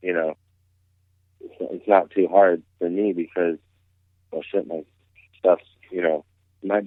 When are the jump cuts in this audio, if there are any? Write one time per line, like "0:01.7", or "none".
none